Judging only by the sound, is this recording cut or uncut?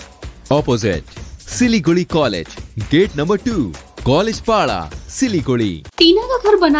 cut